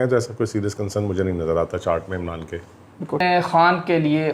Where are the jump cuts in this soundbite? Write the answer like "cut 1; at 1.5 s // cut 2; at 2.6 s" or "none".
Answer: cut 1; at 3.2 s